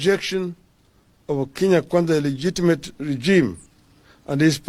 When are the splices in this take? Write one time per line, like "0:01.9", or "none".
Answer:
none